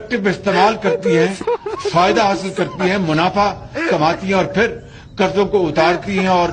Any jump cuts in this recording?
no; 0 cuts

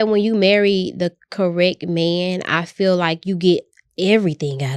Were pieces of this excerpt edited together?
no; 0 cuts

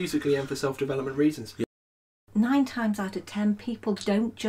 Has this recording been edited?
yes; 1 cut; at 1.6 s

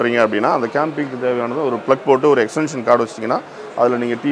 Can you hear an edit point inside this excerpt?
no; 0 cuts

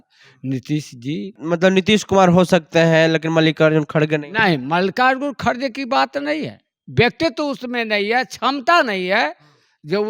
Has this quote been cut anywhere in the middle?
yes; 1 cut; at 1.4 s

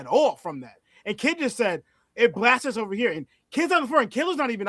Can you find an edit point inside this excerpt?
no; 0 cuts

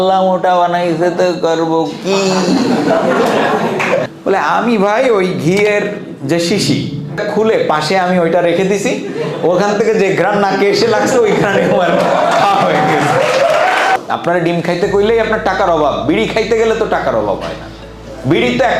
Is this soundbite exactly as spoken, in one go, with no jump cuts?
no; 3 cuts; at 4.1 s, 7.2 s, 14.0 s

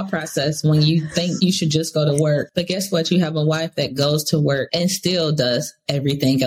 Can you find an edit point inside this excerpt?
yes; 3 cuts; at 1.4 s, 2.5 s, 4.7 s

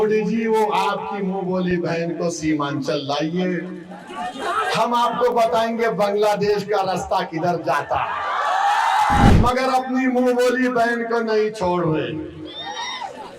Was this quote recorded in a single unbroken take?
no; 1 cut; at 9.3 s

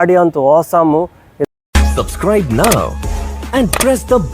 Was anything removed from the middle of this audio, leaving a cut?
yes; 1 cut; at 1.5 s

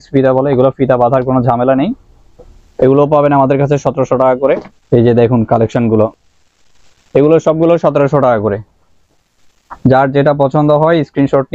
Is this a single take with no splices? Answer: yes; 0 cuts

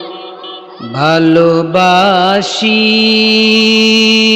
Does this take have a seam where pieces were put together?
no; 0 cuts

